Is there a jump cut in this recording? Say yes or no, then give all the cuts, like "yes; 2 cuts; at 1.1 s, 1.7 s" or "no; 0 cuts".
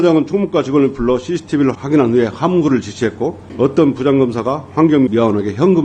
yes; 3 cuts; at 1.8 s, 3.4 s, 5.1 s